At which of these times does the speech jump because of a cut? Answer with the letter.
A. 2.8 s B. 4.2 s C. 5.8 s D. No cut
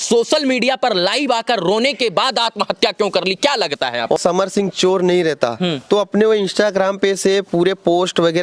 B